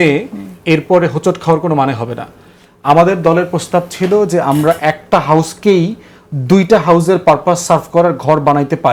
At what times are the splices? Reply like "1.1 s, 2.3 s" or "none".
none